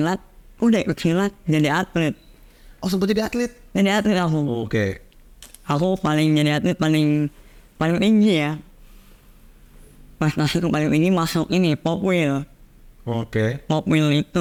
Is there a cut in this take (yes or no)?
no